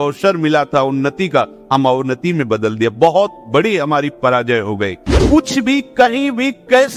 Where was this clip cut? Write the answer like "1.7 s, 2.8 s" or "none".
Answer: 5.1 s